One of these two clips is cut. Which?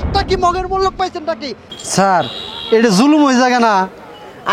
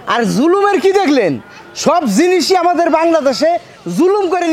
first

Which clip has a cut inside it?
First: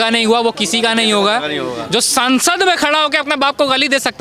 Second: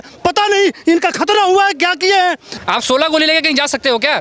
second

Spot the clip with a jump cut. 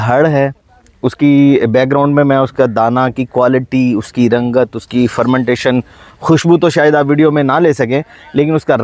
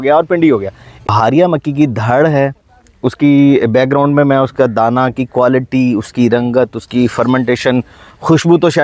second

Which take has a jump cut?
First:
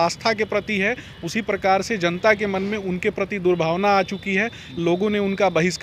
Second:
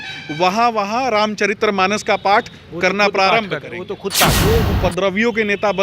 second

